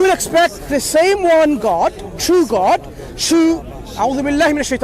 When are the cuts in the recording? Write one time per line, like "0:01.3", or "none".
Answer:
none